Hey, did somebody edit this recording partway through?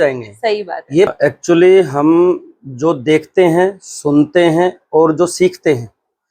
yes; 1 cut; at 1.1 s

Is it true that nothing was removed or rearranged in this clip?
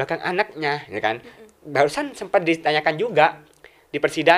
yes; 0 cuts

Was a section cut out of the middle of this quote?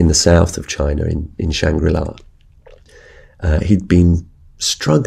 yes; 1 cut; at 2.9 s

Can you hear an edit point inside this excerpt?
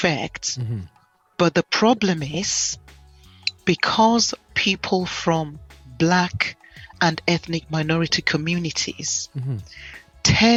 no; 0 cuts

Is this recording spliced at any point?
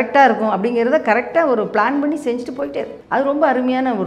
yes; 1 cut; at 3.0 s

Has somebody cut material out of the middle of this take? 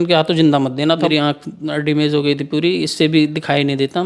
yes; 1 cut; at 1.1 s

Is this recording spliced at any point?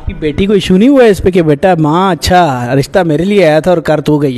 no; 0 cuts

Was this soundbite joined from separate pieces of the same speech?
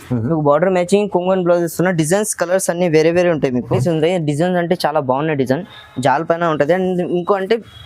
yes; 1 cut; at 3.7 s

